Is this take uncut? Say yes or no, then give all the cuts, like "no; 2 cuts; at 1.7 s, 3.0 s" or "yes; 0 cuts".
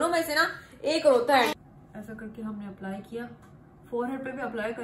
no; 1 cut; at 1.5 s